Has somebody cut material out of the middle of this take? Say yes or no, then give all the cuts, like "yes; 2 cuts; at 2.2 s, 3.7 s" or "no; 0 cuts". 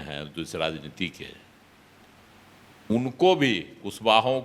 no; 0 cuts